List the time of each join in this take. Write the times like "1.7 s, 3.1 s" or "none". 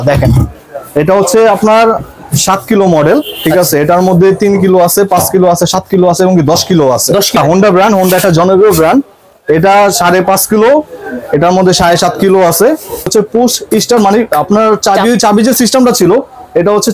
7.4 s, 13.1 s